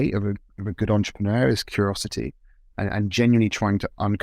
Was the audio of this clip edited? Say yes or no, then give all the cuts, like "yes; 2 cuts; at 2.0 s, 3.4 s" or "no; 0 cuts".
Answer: no; 0 cuts